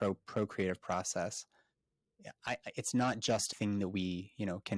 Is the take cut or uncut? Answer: cut